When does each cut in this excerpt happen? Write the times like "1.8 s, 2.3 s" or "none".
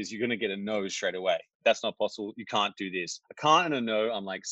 1.5 s, 3.2 s